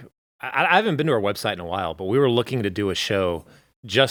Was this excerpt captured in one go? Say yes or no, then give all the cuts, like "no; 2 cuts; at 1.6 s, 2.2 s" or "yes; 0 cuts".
yes; 0 cuts